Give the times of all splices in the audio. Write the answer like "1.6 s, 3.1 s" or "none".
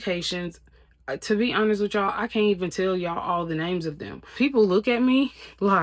4.3 s

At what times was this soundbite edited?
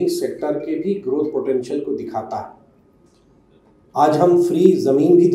none

